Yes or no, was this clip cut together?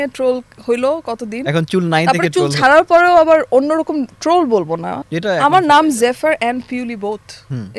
yes